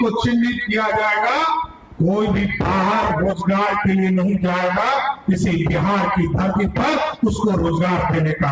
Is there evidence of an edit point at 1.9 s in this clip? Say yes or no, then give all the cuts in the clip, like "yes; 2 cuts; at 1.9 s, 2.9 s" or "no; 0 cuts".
no; 0 cuts